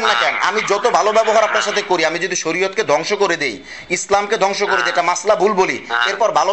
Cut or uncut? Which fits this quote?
uncut